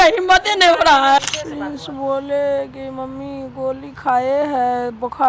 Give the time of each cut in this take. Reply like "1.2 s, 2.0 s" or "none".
1.2 s